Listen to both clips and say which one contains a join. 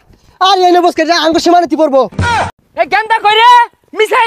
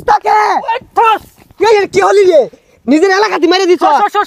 first; 1 cut; at 2.5 s

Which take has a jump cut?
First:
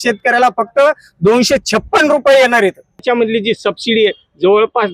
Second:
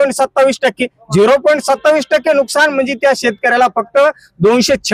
first; 1 cut; at 3.0 s

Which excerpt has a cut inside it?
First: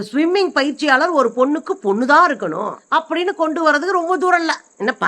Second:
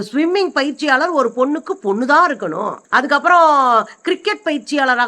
first; 1 cut; at 2.8 s

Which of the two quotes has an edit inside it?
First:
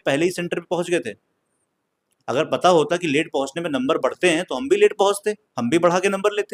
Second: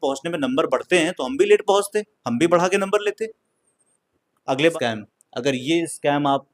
second; 1 cut; at 4.7 s

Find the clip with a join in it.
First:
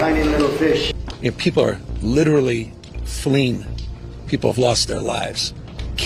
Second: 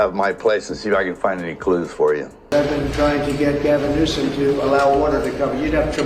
second; 1 cut; at 2.3 s

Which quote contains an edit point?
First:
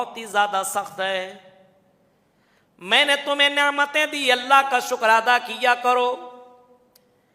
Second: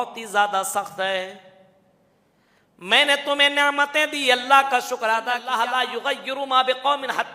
second; 1 cut; at 5.4 s

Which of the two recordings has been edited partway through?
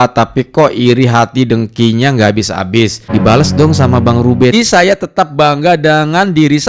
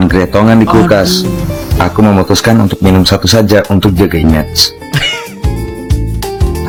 first; 2 cuts; at 3.0 s, 4.5 s

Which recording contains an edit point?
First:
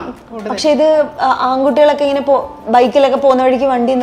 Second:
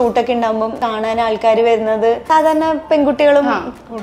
second; 2 cuts; at 0.8 s, 2.2 s

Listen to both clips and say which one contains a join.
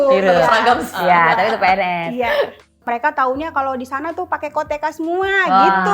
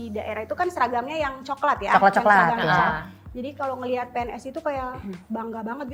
first; 2 cuts; at 0.9 s, 2.7 s

